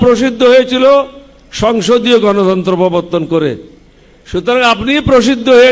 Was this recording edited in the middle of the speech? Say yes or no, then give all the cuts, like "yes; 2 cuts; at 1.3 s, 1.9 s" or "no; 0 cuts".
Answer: no; 0 cuts